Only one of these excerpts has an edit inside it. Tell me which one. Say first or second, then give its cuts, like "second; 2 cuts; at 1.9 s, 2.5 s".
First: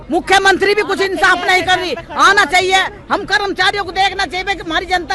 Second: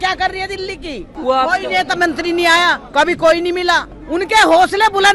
second; 2 cuts; at 1.1 s, 3.9 s